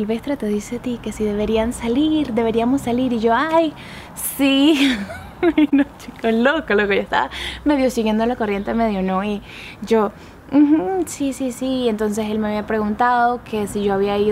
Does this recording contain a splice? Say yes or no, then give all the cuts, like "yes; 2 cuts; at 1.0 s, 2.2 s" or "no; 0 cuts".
no; 0 cuts